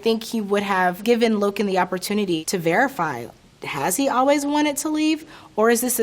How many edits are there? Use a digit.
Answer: 1